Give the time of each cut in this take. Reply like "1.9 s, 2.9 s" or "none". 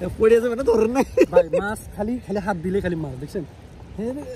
none